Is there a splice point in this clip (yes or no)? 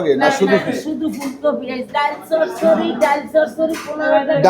yes